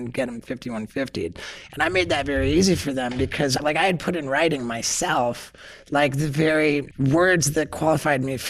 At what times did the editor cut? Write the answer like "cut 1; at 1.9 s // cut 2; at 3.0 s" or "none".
cut 1; at 3.6 s // cut 2; at 6.9 s